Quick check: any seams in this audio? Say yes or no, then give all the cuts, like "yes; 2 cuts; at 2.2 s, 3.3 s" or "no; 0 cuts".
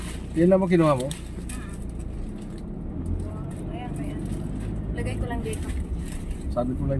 no; 0 cuts